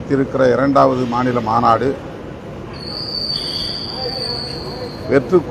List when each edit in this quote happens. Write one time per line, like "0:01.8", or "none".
none